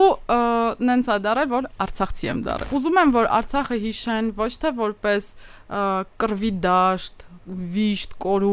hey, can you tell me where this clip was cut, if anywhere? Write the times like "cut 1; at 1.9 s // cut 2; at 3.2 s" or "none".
cut 1; at 2.6 s